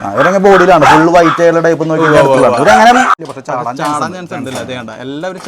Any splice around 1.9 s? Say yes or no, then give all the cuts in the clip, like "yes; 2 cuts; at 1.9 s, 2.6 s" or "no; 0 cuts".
no; 1 cut; at 3.2 s